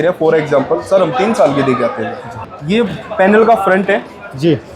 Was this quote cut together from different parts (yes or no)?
yes